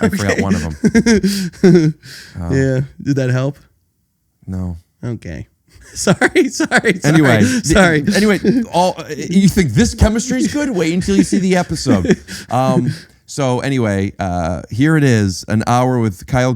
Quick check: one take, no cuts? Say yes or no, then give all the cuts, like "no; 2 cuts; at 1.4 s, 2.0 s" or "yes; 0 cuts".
no; 1 cut; at 5.9 s